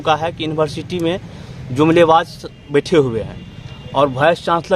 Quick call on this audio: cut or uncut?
uncut